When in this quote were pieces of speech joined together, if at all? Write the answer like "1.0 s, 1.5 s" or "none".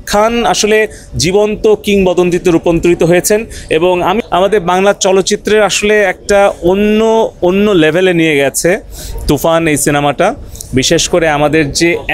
4.2 s